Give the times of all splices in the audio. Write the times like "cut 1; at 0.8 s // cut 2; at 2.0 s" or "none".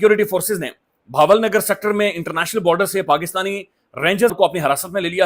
cut 1; at 4.3 s

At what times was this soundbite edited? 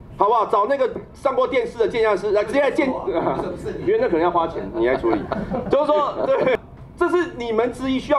cut 1; at 6.6 s

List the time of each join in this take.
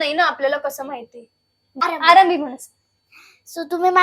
cut 1; at 1.6 s

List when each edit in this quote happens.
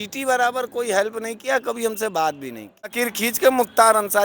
cut 1; at 2.9 s

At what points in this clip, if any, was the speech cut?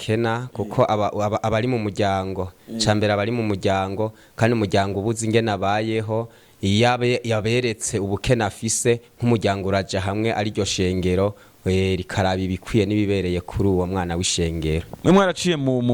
cut 1; at 14.9 s

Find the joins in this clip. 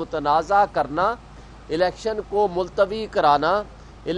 none

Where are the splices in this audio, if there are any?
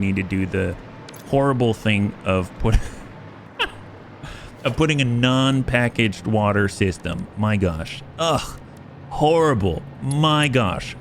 none

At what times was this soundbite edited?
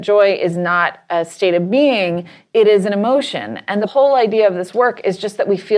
cut 1; at 3.8 s

